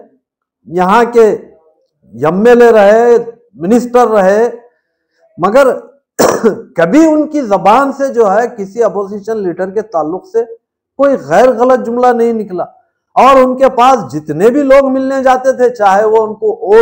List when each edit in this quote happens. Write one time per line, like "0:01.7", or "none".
none